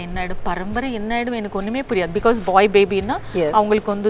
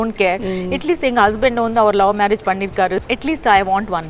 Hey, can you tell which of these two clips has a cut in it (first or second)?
second